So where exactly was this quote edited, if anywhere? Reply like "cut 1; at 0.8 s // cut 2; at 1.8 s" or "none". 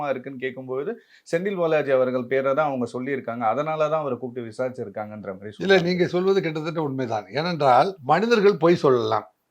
cut 1; at 8.0 s

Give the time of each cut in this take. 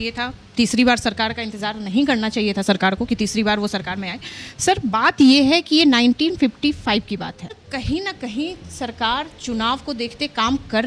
cut 1; at 7.7 s

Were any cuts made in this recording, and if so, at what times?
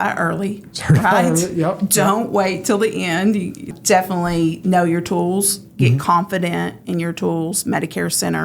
cut 1; at 3.8 s

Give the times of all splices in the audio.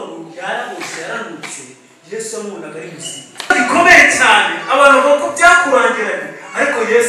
cut 1; at 3.5 s

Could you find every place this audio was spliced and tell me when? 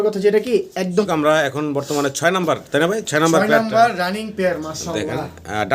cut 1; at 1.1 s

